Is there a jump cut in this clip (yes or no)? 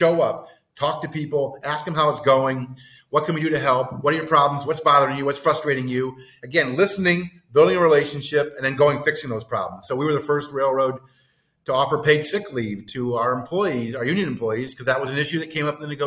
no